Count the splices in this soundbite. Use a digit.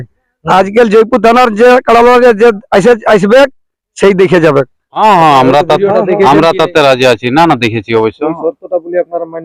1